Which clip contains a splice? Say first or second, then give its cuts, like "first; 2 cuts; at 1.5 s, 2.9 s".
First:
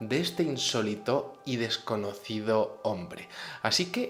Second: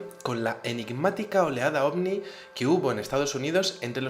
second; 1 cut; at 3.0 s